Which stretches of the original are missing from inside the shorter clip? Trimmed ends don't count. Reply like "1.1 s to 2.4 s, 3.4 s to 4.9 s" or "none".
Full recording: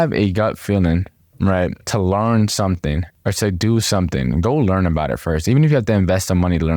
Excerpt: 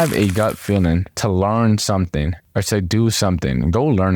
1.1 s to 1.8 s